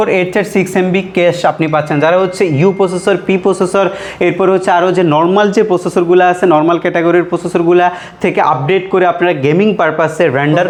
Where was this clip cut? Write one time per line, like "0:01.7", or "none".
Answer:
none